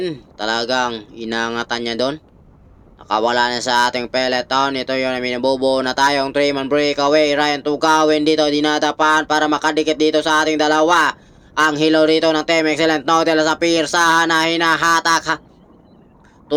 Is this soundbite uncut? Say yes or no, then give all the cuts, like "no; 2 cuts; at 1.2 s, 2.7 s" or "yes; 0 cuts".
yes; 0 cuts